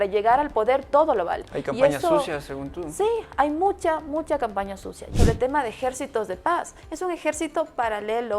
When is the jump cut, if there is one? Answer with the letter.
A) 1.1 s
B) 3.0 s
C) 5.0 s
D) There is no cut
C